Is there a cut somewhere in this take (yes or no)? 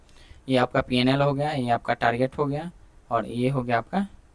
no